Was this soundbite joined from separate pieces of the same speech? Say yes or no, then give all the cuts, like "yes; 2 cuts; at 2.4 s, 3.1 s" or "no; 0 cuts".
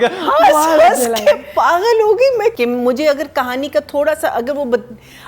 yes; 1 cut; at 2.5 s